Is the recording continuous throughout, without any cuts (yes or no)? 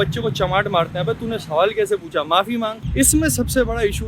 no